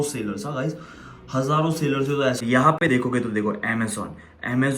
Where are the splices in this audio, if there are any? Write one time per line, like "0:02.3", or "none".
0:02.4